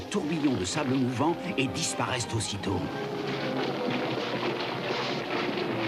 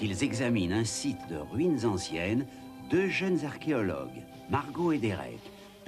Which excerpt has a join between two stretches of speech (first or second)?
second